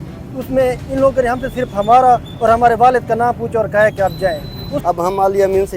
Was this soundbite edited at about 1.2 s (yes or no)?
no